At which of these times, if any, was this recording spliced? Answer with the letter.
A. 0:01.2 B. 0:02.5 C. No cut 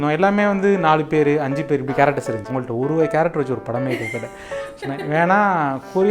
B